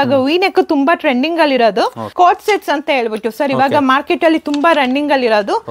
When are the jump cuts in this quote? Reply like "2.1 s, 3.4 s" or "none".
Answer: 2.0 s